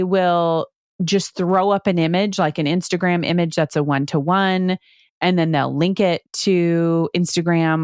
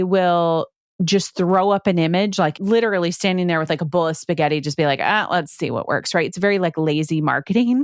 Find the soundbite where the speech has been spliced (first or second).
second